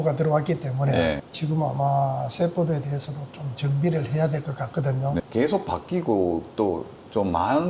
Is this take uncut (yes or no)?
no